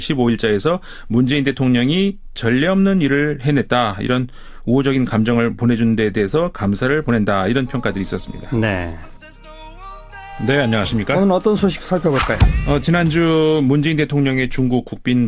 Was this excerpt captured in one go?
yes; 0 cuts

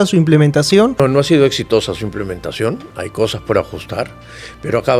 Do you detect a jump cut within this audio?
yes; 1 cut; at 1.0 s

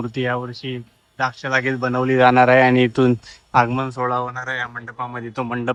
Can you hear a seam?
no; 0 cuts

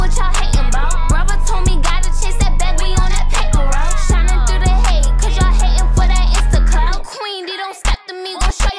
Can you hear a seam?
no; 0 cuts

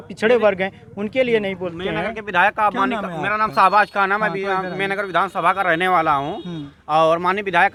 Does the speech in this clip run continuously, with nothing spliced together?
yes; 0 cuts

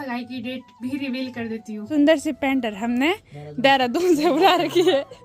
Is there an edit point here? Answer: yes; 1 cut; at 1.9 s

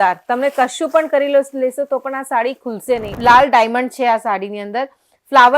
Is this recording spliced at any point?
yes; 1 cut; at 3.1 s

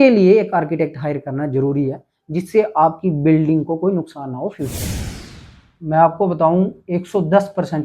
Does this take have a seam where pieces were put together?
yes; 1 cut; at 5.2 s

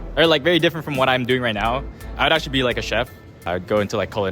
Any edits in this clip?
yes; 2 cuts; at 2.1 s, 3.5 s

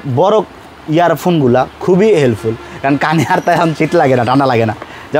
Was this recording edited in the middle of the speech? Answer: no; 0 cuts

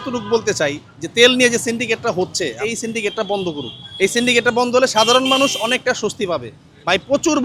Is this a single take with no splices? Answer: yes; 0 cuts

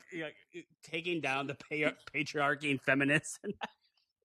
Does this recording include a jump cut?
no; 0 cuts

